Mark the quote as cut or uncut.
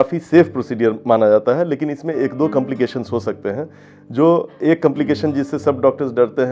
uncut